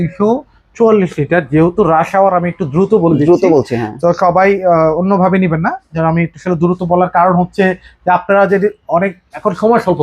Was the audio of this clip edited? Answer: no; 0 cuts

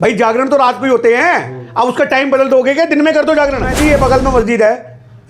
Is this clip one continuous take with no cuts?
no; 1 cut; at 4.2 s

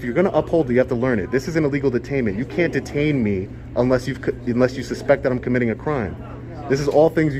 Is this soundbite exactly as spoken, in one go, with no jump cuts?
yes; 0 cuts

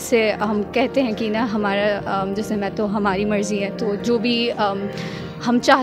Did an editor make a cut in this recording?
no; 0 cuts

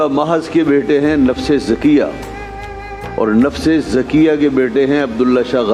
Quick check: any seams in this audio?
no; 0 cuts

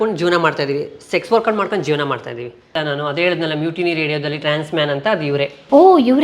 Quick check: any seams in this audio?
yes; 1 cut; at 2.7 s

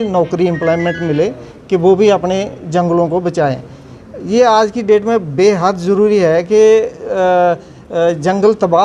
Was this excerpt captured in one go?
yes; 0 cuts

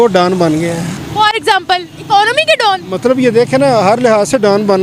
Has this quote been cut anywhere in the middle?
no; 0 cuts

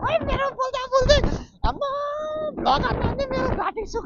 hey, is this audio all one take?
yes; 0 cuts

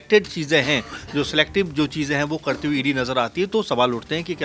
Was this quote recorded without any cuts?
yes; 0 cuts

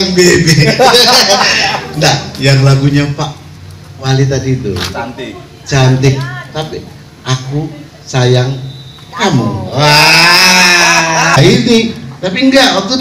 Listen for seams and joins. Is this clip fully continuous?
no; 1 cut; at 11.4 s

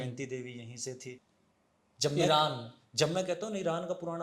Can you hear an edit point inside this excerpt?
yes; 1 cut; at 1.1 s

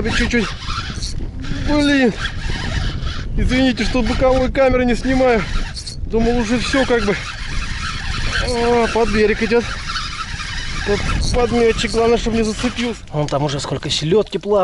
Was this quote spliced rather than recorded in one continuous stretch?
yes; 1 cut; at 13.0 s

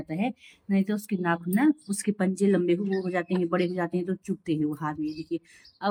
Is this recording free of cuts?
yes; 0 cuts

